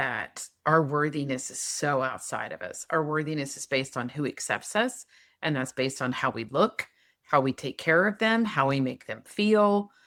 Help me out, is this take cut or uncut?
uncut